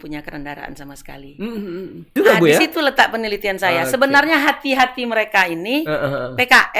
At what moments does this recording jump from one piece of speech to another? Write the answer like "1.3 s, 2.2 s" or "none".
2.1 s